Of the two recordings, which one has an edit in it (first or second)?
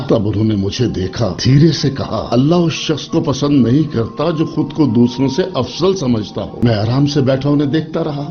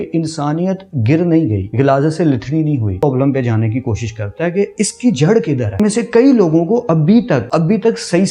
second